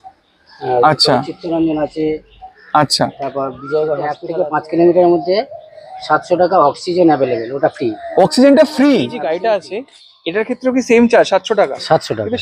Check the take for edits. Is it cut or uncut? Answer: cut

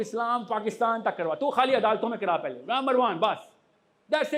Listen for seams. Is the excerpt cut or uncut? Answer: uncut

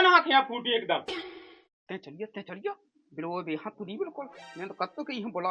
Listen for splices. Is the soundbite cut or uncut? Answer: cut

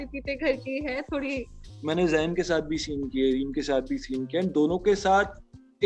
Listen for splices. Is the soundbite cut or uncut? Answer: cut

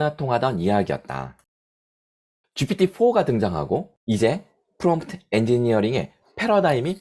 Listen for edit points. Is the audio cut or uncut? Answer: uncut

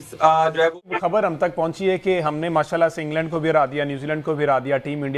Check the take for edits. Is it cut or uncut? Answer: cut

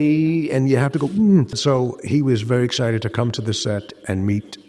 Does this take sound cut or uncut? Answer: cut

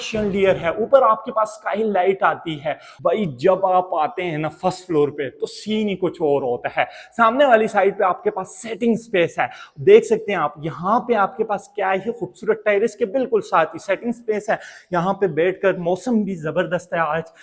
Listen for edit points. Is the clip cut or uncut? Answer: cut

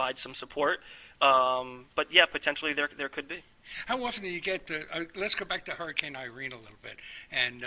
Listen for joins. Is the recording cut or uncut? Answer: uncut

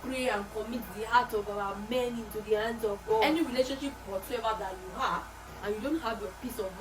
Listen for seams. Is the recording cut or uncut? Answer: cut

